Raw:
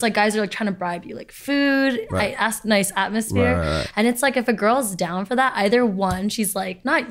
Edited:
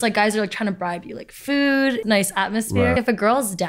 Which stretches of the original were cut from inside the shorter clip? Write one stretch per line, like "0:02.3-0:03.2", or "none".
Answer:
0:02.0-0:02.6
0:03.5-0:04.3